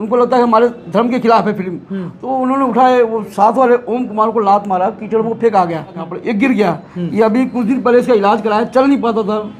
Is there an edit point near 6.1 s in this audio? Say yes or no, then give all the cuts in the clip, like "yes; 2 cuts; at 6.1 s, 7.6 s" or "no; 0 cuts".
yes; 1 cut; at 6.1 s